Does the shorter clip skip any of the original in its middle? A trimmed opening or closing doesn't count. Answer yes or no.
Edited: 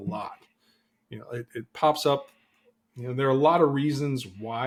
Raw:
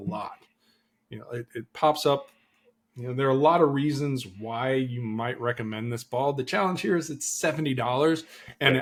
no